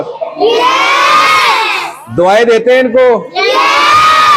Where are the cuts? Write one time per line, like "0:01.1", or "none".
none